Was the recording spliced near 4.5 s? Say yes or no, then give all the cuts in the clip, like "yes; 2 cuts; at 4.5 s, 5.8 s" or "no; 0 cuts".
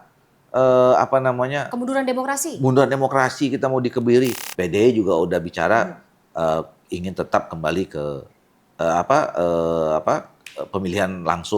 yes; 1 cut; at 4.5 s